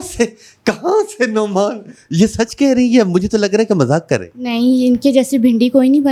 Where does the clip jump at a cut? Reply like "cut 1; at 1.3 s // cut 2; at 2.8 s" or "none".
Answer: none